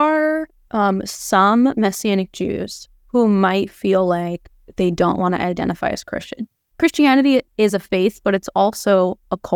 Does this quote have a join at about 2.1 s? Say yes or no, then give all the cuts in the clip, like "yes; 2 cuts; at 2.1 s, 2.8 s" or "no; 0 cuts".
no; 1 cut; at 6.7 s